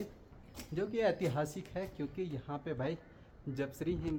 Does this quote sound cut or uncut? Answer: uncut